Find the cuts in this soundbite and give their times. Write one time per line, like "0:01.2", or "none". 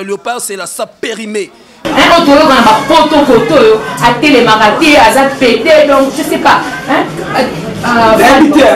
0:01.8